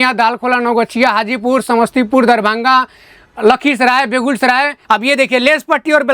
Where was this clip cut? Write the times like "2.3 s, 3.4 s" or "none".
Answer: 4.8 s